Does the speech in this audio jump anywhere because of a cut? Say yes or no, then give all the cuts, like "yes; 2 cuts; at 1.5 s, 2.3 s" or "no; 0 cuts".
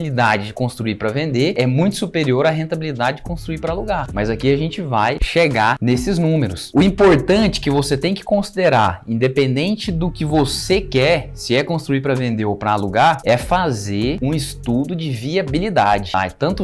yes; 1 cut; at 1.5 s